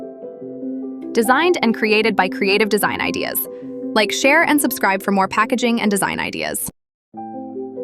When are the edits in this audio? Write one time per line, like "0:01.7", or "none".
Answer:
0:01.1
0:06.6